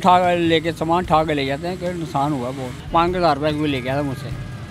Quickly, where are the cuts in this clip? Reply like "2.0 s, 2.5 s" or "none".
2.7 s